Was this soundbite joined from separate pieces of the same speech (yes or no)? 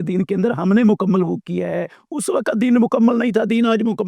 no